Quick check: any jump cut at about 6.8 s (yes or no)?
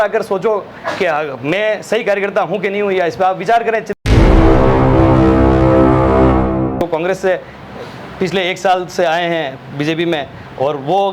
yes